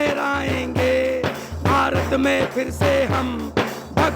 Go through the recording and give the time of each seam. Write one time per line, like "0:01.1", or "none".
none

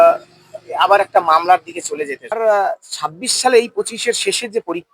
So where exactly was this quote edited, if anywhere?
0:02.4

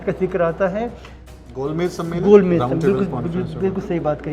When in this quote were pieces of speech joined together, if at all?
0:01.4

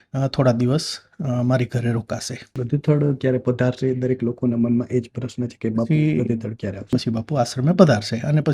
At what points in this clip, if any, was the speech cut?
0:02.6
0:06.8

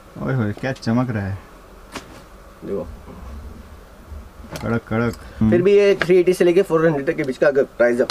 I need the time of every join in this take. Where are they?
0:05.3

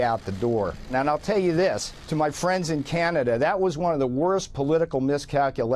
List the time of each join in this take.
0:00.9
0:01.9

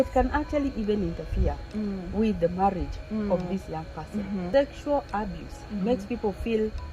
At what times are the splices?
0:04.4

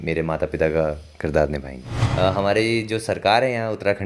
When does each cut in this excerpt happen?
0:01.9

